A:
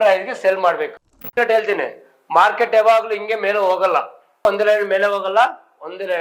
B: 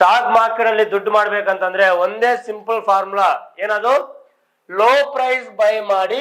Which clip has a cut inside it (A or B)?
A